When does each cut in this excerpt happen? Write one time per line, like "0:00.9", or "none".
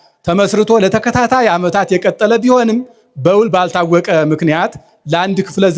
none